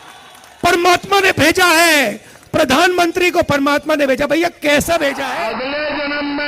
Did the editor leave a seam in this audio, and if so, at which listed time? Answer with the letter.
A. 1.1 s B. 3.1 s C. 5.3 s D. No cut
C